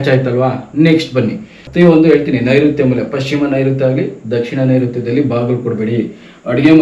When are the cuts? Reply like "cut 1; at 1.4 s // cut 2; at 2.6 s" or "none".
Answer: cut 1; at 1.6 s